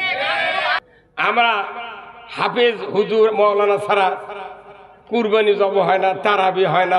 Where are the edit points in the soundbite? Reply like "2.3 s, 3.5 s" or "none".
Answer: 1.3 s